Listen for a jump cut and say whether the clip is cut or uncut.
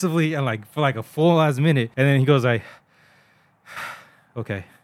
cut